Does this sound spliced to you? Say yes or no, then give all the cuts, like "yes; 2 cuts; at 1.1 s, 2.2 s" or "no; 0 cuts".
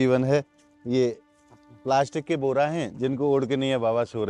no; 0 cuts